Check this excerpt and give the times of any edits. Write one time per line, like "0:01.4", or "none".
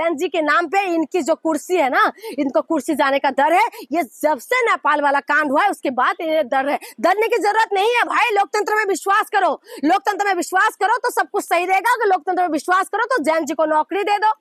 none